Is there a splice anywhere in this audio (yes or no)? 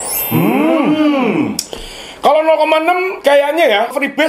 no